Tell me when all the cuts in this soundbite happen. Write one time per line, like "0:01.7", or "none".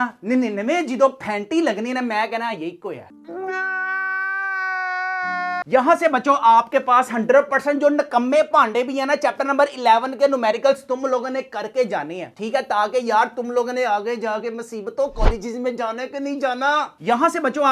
none